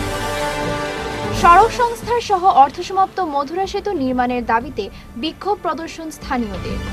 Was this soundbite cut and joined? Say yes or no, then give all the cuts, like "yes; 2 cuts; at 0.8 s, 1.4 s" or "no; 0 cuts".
no; 0 cuts